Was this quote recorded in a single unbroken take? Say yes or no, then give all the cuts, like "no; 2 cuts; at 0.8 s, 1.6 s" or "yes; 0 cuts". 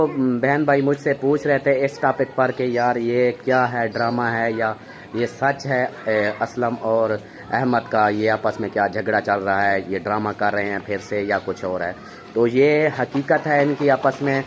yes; 0 cuts